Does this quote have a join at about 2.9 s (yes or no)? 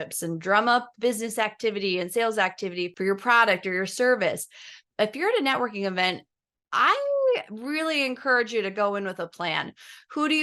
yes